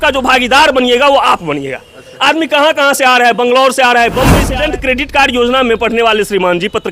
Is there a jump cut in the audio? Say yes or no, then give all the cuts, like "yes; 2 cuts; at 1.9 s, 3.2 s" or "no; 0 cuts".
yes; 1 cut; at 4.4 s